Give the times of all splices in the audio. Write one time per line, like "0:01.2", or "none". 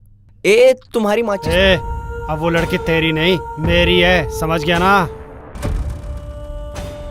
0:01.4